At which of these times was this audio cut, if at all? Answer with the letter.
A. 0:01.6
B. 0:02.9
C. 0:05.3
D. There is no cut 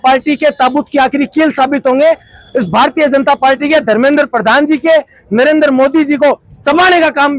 D